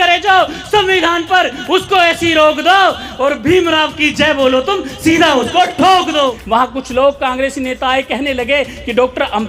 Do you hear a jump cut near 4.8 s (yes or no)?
no